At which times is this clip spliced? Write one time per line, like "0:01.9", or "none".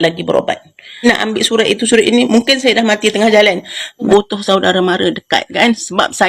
0:01.0
0:04.1